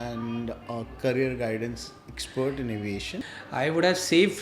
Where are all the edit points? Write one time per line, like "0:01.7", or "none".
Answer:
0:03.1